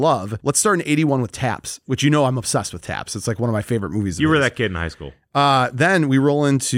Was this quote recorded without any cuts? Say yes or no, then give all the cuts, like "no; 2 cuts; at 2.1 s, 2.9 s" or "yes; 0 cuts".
yes; 0 cuts